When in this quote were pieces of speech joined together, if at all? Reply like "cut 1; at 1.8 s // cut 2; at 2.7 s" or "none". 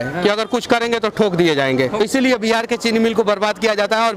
cut 1; at 2.0 s